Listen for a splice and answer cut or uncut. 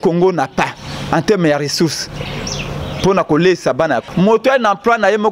cut